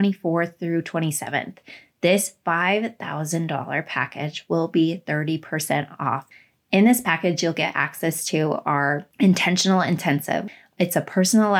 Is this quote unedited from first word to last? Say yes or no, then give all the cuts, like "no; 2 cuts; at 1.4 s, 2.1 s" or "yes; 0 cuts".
no; 3 cuts; at 6.3 s, 9.1 s, 10.5 s